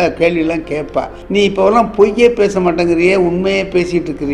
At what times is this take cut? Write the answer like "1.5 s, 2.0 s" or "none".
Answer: 1.2 s